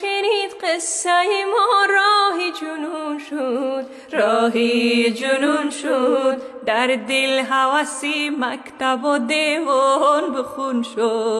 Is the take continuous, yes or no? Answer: yes